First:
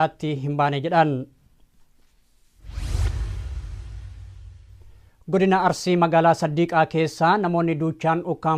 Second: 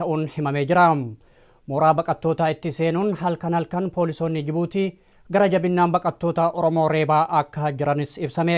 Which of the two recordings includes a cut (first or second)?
second